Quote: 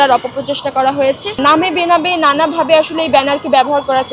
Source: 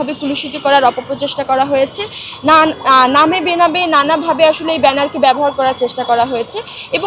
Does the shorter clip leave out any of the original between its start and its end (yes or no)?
yes